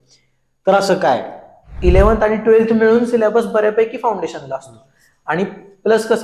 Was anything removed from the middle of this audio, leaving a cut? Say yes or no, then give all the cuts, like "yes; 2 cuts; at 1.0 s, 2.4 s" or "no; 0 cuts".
yes; 1 cut; at 1.7 s